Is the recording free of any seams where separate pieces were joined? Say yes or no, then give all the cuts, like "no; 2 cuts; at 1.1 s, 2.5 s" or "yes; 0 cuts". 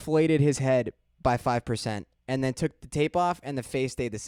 yes; 0 cuts